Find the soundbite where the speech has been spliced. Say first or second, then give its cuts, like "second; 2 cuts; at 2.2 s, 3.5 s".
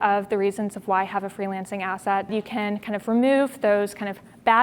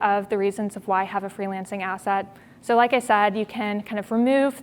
first; 1 cut; at 2.3 s